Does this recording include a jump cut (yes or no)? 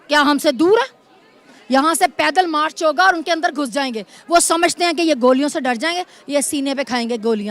no